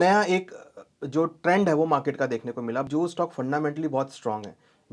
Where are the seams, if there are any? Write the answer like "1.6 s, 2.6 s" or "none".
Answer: 2.9 s